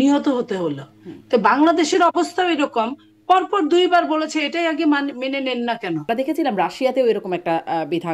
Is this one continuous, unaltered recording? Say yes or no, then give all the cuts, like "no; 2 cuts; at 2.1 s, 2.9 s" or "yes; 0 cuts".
no; 1 cut; at 6.0 s